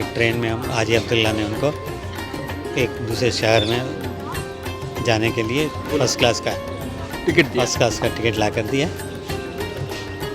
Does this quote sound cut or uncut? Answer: uncut